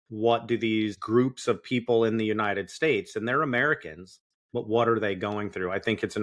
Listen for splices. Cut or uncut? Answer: cut